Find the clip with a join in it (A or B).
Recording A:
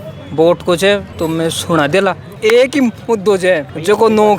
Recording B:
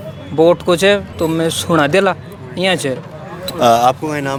A